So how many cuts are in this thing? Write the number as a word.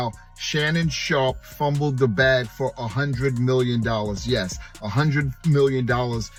zero